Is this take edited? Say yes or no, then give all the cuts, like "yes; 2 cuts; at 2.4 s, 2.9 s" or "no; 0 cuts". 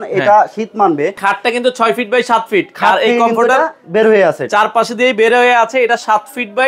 yes; 1 cut; at 1.2 s